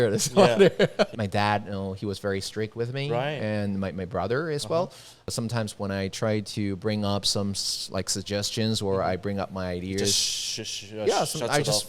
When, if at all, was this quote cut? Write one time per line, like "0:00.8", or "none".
0:01.1
0:05.3